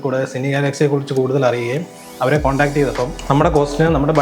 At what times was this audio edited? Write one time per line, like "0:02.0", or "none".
0:03.2